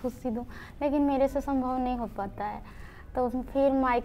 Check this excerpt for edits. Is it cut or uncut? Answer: uncut